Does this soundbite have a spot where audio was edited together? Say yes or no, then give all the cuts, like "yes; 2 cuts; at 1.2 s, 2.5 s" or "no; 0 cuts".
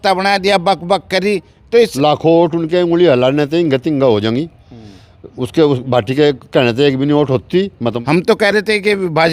yes; 2 cuts; at 1.9 s, 8.0 s